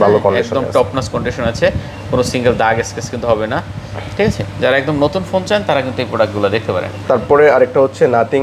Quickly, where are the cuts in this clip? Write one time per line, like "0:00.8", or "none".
none